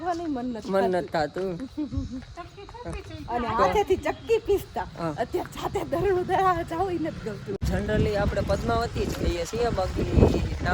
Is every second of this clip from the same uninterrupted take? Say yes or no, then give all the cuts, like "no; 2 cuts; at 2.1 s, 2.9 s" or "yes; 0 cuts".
no; 1 cut; at 7.5 s